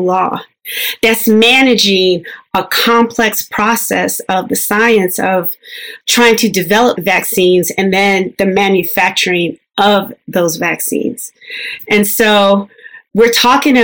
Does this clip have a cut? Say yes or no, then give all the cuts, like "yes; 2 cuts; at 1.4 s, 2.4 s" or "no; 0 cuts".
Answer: no; 0 cuts